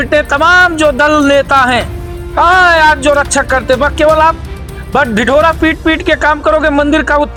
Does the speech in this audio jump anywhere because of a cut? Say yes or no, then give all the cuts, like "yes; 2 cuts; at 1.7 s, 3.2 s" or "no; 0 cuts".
no; 0 cuts